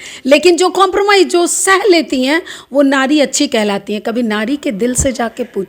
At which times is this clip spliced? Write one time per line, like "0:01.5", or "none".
none